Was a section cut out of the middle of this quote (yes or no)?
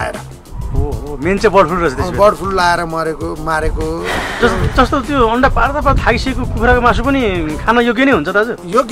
yes